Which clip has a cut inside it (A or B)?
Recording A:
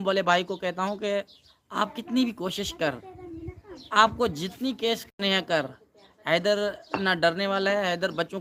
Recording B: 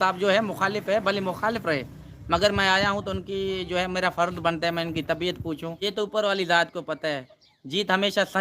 B